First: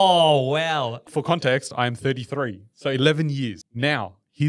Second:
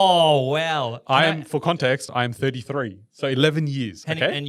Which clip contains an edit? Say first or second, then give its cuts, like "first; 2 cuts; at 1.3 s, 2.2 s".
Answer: first; 2 cuts; at 1.0 s, 3.6 s